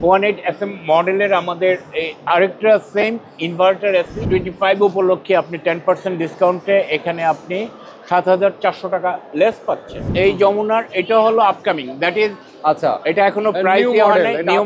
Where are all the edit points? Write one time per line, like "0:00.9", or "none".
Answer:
0:04.2
0:10.0